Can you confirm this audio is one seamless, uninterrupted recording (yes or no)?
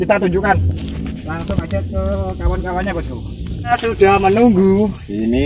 no